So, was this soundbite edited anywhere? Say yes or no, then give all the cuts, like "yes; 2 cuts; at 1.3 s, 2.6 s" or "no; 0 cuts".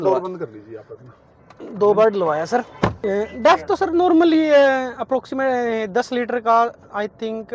yes; 1 cut; at 3.0 s